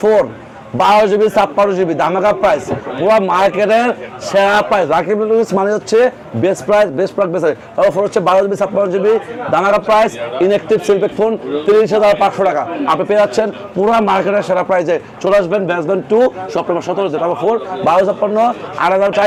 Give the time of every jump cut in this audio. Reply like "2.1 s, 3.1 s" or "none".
none